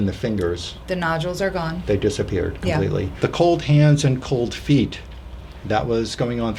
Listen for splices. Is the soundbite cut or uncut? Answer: uncut